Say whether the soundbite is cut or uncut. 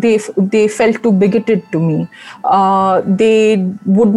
uncut